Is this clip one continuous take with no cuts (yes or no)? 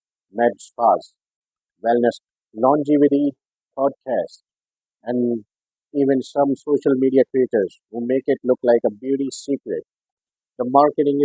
no